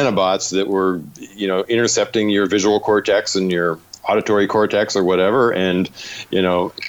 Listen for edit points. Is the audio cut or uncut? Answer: uncut